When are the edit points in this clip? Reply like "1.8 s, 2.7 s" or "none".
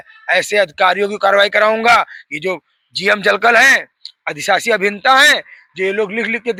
none